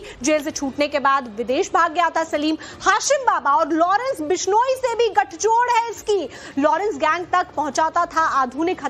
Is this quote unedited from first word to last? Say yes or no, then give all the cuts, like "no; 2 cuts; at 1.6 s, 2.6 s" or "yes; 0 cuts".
yes; 0 cuts